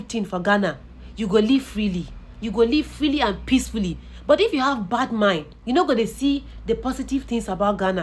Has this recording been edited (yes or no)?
no